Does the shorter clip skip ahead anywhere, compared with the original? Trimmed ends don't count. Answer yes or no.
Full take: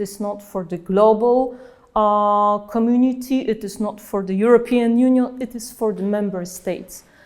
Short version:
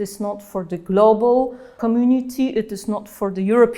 yes